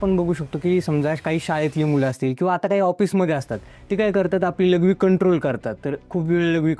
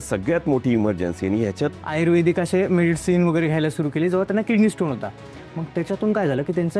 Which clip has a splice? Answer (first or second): second